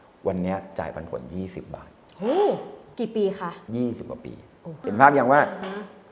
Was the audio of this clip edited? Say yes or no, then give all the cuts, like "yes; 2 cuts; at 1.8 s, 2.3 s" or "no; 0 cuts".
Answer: yes; 2 cuts; at 3.1 s, 4.9 s